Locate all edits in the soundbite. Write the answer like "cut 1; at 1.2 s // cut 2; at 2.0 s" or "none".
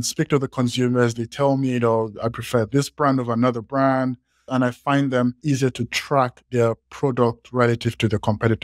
cut 1; at 4.5 s // cut 2; at 5.4 s